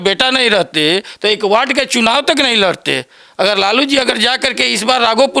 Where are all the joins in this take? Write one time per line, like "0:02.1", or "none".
none

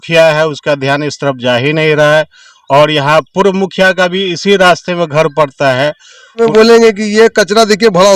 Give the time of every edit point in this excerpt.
0:06.4

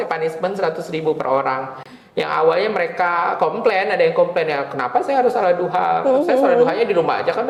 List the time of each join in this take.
none

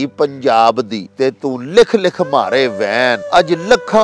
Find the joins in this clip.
0:01.0
0:03.2

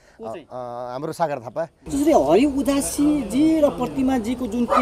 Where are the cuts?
0:01.8

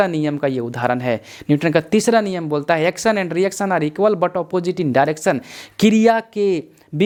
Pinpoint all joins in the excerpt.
none

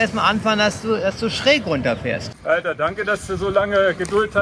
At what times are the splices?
0:02.3

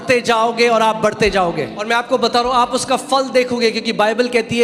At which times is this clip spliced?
0:01.8

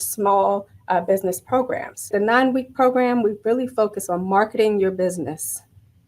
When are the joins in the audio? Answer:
0:02.1

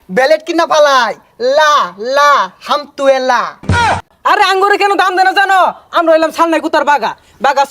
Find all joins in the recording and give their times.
0:04.1

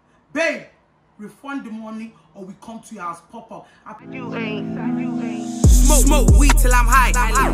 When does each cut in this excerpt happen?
0:04.0

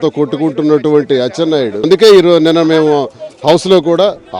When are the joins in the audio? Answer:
0:01.8

